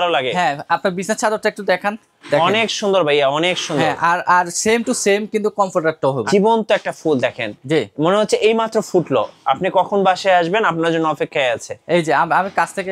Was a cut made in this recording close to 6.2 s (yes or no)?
yes